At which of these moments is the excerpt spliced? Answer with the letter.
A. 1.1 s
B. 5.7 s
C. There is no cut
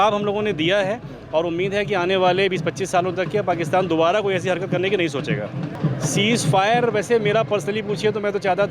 B